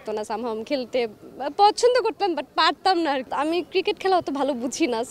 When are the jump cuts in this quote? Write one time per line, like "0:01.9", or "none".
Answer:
0:03.2